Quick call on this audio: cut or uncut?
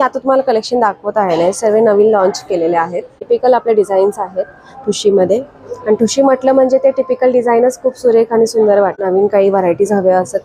cut